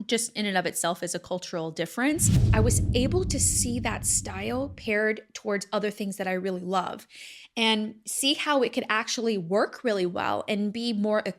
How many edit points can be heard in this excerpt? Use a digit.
1